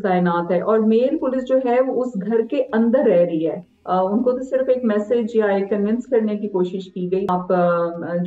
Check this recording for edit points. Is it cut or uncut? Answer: cut